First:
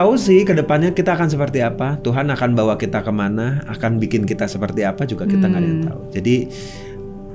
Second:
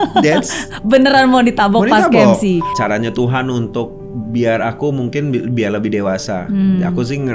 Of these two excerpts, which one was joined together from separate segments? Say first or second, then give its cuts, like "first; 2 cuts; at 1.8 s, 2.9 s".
second; 1 cut; at 2.7 s